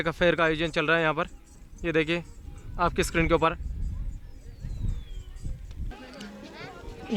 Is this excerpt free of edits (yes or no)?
yes